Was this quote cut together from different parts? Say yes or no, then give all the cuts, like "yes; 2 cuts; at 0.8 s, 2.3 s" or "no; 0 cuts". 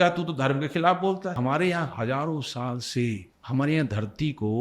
yes; 2 cuts; at 1.4 s, 3.3 s